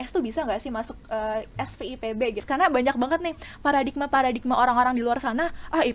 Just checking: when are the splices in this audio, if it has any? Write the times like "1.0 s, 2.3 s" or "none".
2.4 s